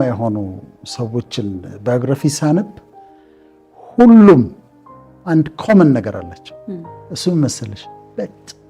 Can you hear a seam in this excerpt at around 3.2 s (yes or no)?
no